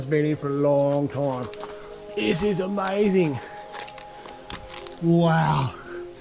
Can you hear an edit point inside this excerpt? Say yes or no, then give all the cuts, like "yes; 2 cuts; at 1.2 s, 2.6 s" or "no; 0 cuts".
no; 0 cuts